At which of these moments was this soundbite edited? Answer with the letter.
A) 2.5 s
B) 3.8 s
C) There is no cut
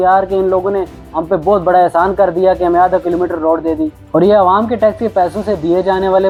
C